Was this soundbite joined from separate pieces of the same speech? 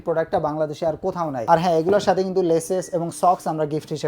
yes; 1 cut; at 1.4 s

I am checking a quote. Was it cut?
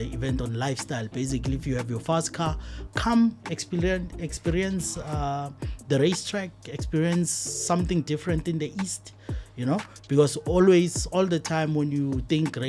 no; 0 cuts

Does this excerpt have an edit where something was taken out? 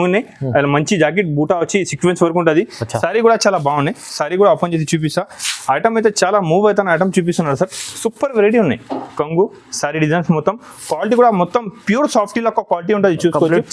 no; 0 cuts

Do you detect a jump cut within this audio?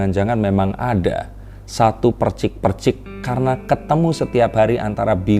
no; 0 cuts

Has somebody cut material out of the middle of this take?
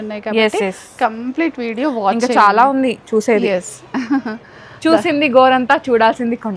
no; 0 cuts

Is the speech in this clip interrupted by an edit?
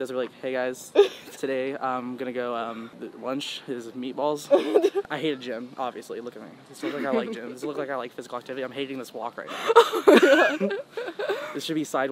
yes; 2 cuts; at 3.0 s, 5.0 s

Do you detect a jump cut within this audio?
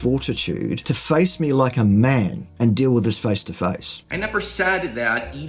yes; 1 cut; at 3.9 s

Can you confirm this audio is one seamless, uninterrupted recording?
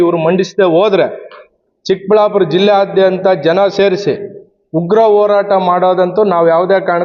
yes; 0 cuts

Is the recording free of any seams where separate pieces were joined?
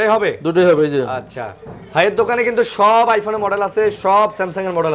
yes; 0 cuts

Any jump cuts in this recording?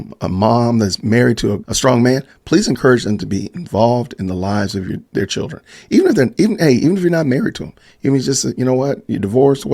yes; 2 cuts; at 1.7 s, 5.0 s

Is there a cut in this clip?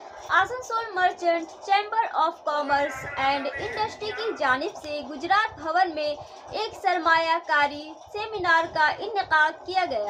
no; 0 cuts

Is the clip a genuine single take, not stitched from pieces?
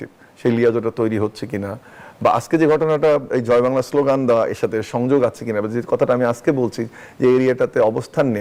yes; 0 cuts

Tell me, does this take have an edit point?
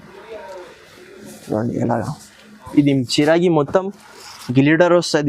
yes; 1 cut; at 2.7 s

